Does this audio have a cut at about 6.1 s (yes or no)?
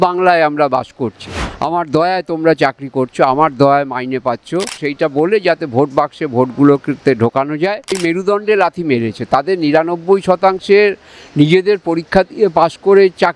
no